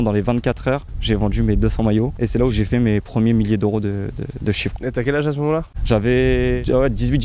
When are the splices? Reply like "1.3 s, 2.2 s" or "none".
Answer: none